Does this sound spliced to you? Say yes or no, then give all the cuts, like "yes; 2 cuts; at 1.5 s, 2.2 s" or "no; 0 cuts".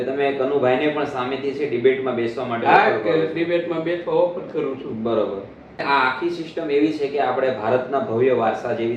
yes; 1 cut; at 5.8 s